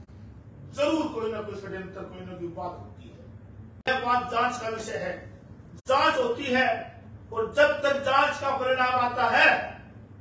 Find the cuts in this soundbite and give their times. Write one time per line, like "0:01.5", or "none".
0:03.8